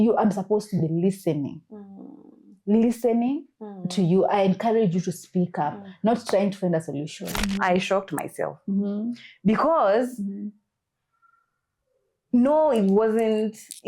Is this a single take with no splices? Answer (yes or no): no